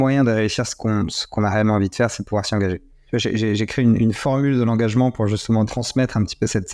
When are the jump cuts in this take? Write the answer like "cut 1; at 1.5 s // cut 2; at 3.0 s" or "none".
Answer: cut 1; at 2.9 s // cut 2; at 5.7 s